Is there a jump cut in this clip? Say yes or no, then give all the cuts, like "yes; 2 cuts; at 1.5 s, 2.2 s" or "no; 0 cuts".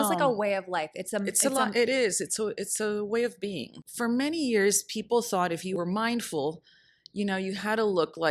yes; 2 cuts; at 3.8 s, 5.7 s